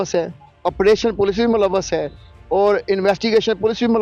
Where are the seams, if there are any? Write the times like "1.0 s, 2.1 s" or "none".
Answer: none